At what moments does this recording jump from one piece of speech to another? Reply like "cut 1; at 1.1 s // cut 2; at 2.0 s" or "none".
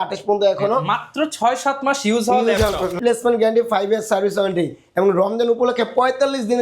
cut 1; at 3.0 s